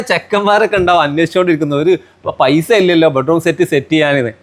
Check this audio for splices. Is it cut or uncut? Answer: uncut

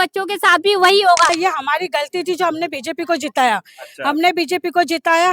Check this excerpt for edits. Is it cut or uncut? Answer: cut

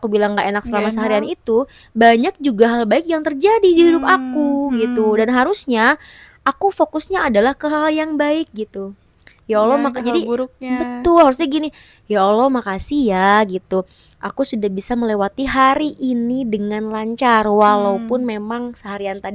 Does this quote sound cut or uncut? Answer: uncut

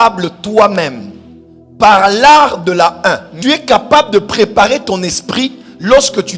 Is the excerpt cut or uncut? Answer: cut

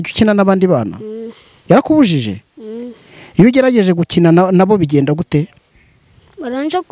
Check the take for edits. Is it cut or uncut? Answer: uncut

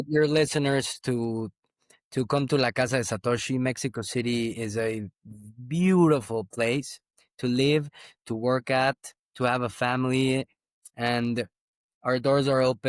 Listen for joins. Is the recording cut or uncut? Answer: uncut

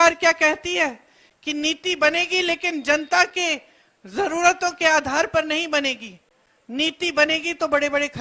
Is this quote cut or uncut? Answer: uncut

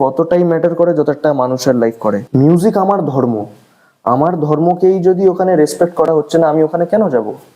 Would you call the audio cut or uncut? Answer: cut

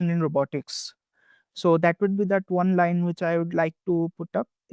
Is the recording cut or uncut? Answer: uncut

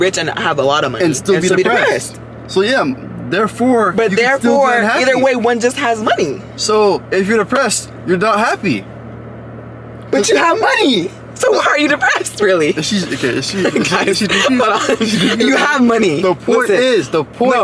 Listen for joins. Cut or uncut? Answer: uncut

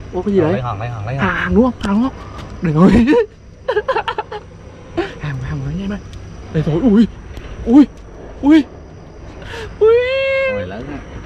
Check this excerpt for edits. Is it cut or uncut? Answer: uncut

